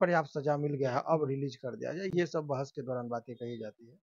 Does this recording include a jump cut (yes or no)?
no